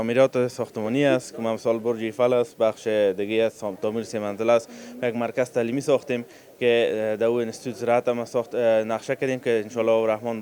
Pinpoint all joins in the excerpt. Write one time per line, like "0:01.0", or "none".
none